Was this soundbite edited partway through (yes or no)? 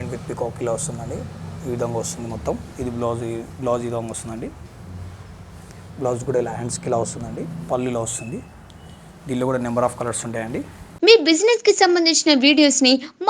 yes